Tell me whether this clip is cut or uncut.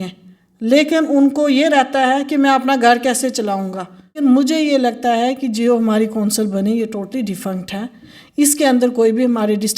cut